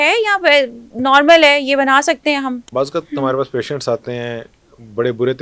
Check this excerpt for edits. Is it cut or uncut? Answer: cut